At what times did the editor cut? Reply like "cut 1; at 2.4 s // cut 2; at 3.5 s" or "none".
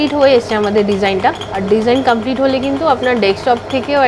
cut 1; at 1.4 s